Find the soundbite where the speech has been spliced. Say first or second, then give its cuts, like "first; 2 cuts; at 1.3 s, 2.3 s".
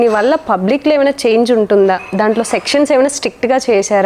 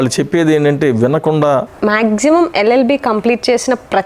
second; 1 cut; at 1.7 s